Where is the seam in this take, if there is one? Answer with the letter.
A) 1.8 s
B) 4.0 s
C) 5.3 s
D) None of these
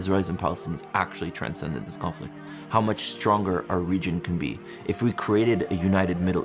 D